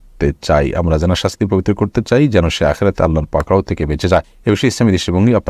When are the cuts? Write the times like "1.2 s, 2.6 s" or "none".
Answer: 4.3 s